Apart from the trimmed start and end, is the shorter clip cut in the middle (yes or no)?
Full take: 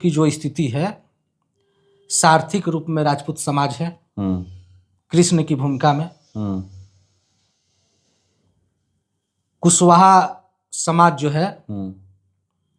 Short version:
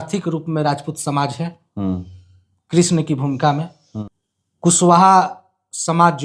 yes